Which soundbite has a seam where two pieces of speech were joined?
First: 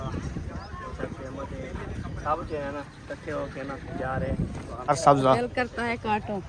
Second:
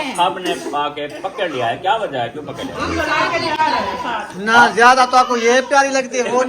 first; 1 cut; at 4.9 s

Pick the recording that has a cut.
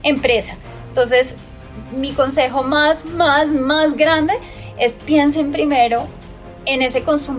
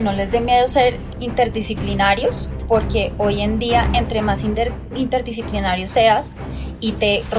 second; 1 cut; at 1.1 s

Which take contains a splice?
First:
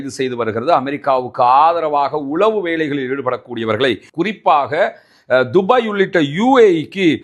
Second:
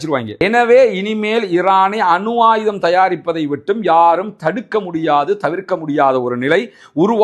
first; 1 cut; at 4.1 s

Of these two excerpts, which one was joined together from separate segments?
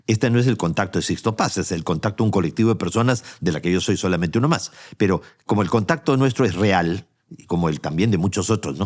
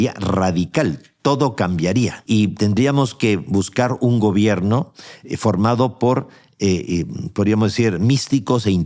second; 1 cut; at 2.2 s

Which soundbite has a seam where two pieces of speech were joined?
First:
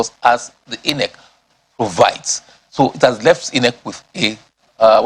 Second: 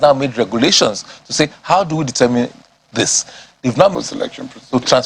second; 1 cut; at 4.0 s

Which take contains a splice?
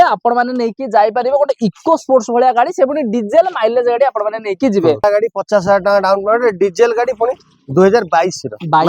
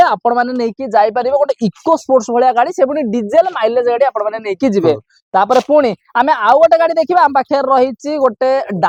first; 1 cut; at 5.0 s

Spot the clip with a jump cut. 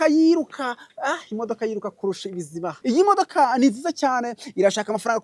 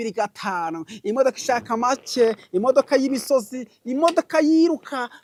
first; 1 cut; at 2.8 s

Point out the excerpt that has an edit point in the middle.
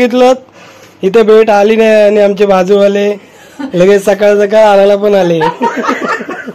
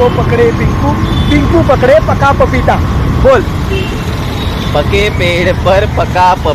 first; 1 cut; at 5.4 s

